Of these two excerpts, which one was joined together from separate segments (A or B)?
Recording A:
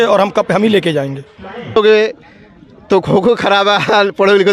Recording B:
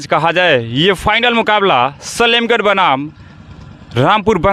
A